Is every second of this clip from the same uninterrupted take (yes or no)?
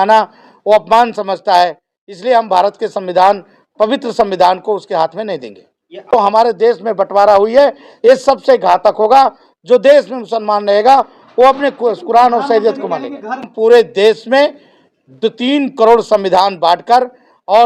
no